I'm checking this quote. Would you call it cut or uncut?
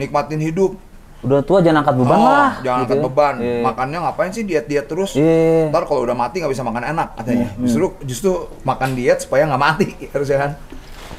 uncut